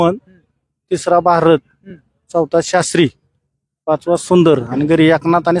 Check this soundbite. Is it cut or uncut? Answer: uncut